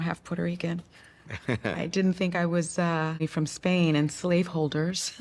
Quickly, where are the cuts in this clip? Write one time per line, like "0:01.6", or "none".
0:03.3

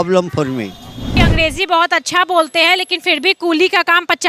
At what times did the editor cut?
0:01.1

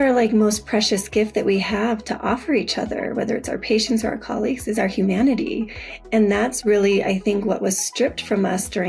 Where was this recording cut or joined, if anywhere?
none

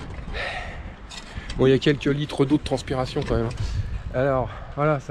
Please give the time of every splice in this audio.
none

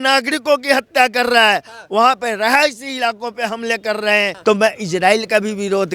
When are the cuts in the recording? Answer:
0:04.3

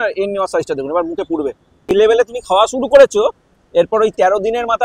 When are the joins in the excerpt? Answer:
0:01.9

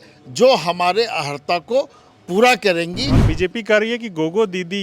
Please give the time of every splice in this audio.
0:03.2

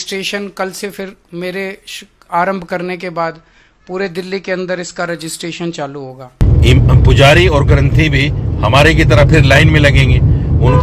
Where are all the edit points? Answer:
0:06.4

